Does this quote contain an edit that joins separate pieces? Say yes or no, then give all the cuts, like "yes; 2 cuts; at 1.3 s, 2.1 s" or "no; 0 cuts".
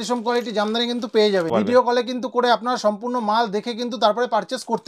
yes; 1 cut; at 1.5 s